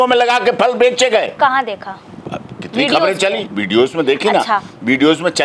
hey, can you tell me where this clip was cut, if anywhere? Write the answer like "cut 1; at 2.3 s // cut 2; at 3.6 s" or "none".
none